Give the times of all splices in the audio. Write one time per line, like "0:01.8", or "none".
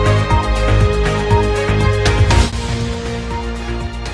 0:02.2